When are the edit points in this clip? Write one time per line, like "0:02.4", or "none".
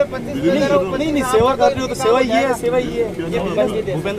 none